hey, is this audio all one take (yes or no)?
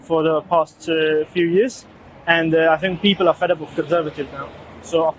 yes